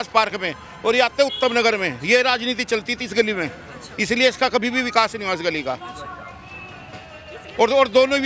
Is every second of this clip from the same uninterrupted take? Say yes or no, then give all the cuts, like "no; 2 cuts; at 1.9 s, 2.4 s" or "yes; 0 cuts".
yes; 0 cuts